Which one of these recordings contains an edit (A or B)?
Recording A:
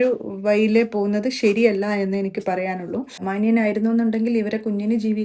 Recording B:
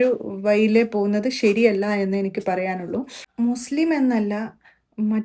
A